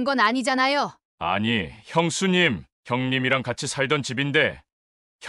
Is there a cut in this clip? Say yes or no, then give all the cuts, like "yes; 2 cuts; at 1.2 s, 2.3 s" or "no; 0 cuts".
yes; 1 cut; at 1.0 s